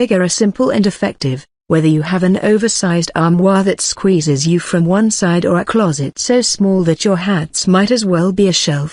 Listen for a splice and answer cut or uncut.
uncut